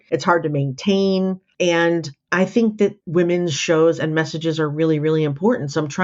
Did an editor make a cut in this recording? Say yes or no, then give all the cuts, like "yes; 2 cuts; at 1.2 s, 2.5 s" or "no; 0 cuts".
yes; 2 cuts; at 1.7 s, 3.0 s